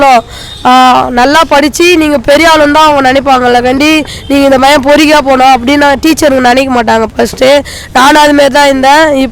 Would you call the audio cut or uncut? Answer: uncut